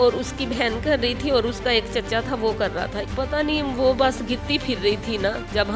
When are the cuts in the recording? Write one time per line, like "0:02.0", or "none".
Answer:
0:03.0

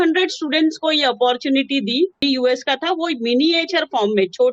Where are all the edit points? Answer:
0:02.2

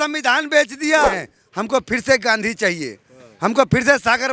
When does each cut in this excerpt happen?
0:01.3

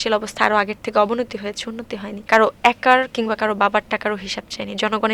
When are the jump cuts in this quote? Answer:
0:02.1

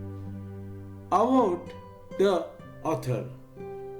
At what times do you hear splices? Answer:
0:01.1

